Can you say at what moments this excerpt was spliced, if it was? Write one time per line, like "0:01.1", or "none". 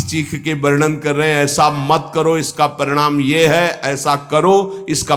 none

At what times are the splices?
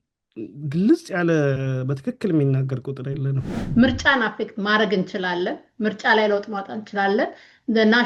0:03.6

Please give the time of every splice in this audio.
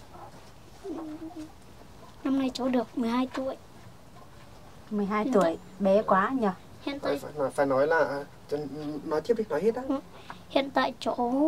none

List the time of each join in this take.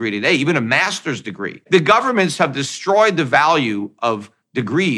0:01.6

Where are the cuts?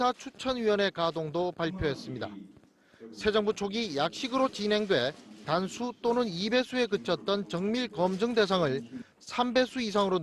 0:08.7

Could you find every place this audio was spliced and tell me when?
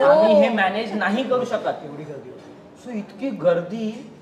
none

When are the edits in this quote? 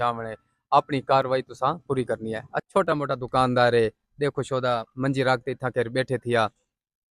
0:02.5

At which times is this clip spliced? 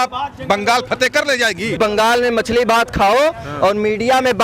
0:01.8

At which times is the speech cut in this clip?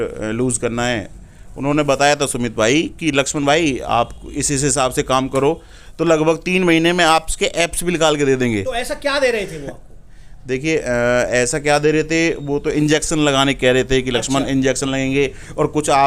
none

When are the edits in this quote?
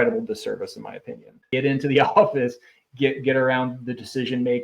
0:01.5

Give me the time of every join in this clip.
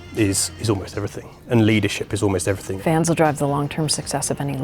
0:02.7

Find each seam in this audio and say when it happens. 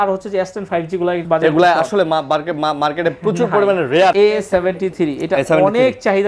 0:01.2
0:04.1

